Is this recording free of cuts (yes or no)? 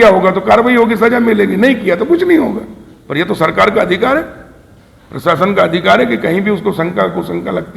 yes